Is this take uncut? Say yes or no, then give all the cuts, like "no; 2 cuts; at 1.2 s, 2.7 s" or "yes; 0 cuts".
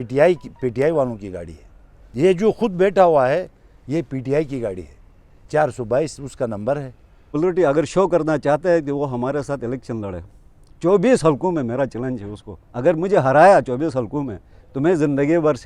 no; 1 cut; at 7.3 s